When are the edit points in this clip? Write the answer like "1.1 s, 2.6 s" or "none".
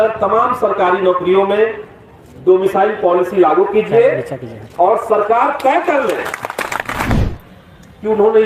7.1 s